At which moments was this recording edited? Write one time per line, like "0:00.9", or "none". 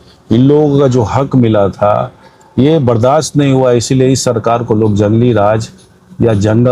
none

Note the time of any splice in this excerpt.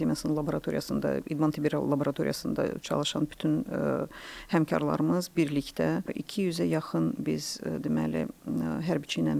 none

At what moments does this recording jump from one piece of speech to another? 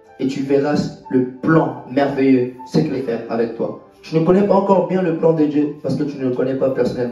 0:03.0

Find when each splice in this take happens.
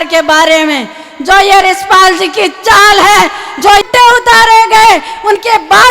0:03.8

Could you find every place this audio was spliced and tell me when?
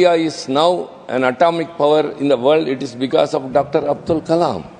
none

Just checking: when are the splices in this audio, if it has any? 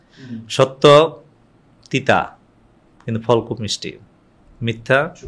none

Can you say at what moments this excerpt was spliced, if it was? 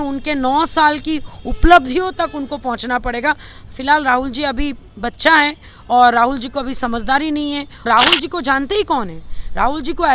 0:07.9

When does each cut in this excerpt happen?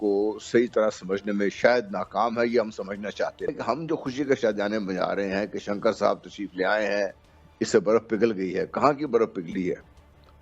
0:03.5

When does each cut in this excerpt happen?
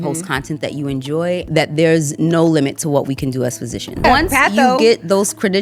0:01.5
0:04.0

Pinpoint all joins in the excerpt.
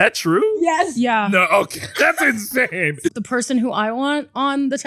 0:03.2

